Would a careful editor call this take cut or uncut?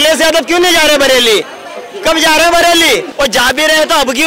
cut